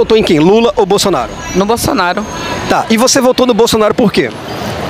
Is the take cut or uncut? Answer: uncut